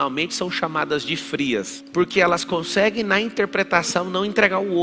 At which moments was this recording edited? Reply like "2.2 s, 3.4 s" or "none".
1.8 s

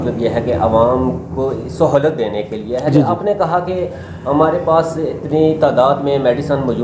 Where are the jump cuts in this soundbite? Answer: none

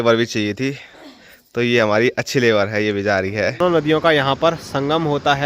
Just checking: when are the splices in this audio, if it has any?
3.6 s

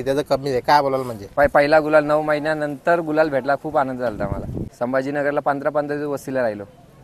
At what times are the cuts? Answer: 1.2 s, 4.7 s

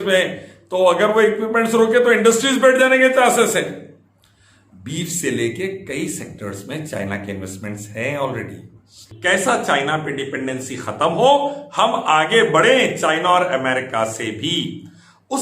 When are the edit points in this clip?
9.1 s

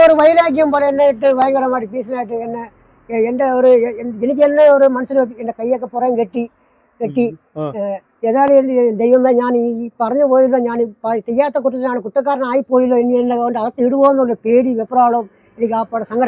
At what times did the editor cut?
none

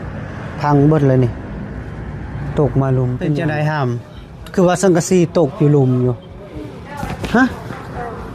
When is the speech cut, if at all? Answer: 3.4 s

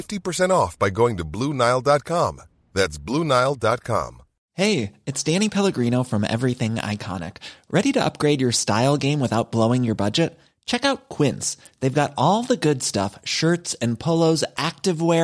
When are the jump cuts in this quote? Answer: none

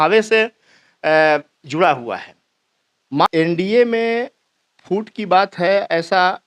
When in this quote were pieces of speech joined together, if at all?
3.3 s

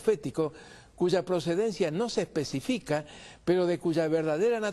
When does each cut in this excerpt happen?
2.1 s

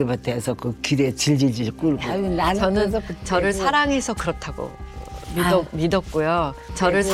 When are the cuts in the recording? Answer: 2.1 s

